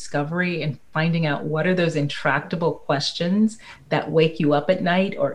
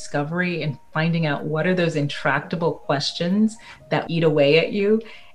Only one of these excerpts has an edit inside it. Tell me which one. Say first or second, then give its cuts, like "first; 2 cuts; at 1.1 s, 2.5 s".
second; 1 cut; at 4.1 s